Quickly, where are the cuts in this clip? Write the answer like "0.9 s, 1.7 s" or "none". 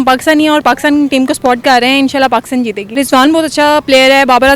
2.8 s